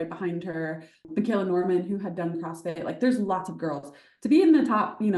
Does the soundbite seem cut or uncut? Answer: cut